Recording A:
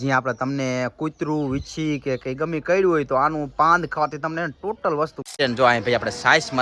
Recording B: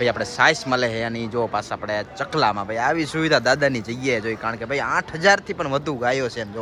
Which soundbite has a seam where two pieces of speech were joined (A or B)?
A